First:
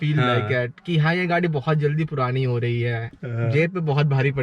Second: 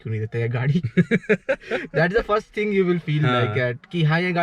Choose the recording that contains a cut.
first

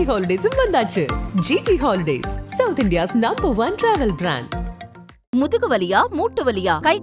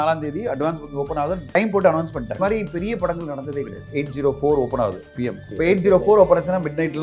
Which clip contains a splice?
second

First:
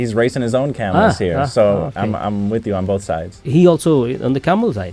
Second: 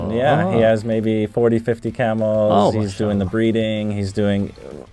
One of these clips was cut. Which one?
first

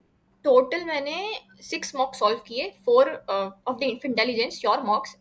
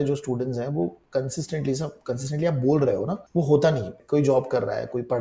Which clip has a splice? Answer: second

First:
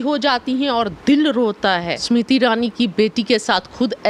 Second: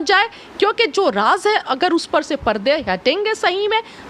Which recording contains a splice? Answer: first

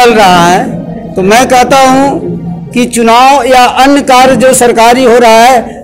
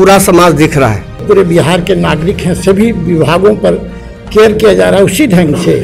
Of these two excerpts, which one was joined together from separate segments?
second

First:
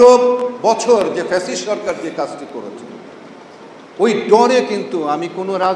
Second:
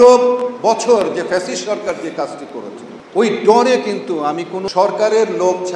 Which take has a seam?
second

